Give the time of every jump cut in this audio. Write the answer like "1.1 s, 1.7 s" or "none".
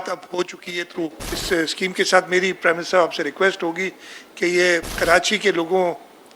1.3 s, 4.9 s